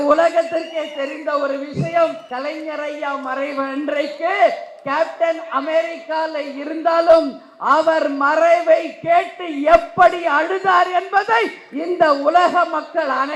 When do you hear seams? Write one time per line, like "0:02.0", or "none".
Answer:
0:02.2